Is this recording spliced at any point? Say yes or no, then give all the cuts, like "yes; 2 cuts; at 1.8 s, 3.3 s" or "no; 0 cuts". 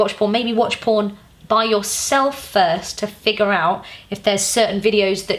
no; 0 cuts